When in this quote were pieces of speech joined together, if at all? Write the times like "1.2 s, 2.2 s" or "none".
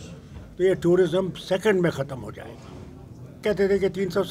3.4 s